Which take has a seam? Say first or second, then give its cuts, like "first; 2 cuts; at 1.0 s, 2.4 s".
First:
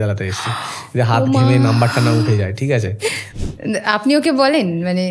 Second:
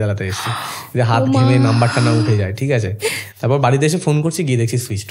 first; 1 cut; at 3.3 s